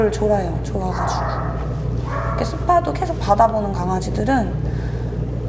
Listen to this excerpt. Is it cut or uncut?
uncut